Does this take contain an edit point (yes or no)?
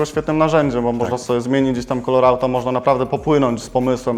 no